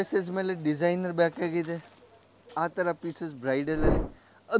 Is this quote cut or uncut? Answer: uncut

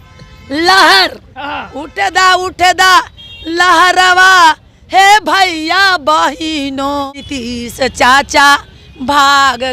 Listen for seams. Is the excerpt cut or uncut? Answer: cut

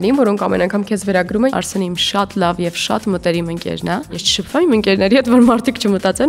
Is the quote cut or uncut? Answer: cut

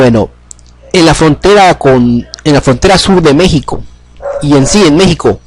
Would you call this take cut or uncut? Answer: cut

